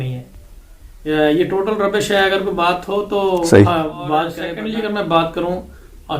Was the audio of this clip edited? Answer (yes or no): yes